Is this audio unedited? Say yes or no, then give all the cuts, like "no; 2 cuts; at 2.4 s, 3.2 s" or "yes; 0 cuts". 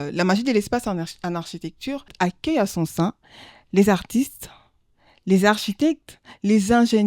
no; 1 cut; at 2.1 s